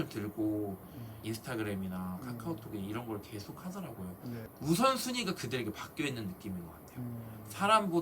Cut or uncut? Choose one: cut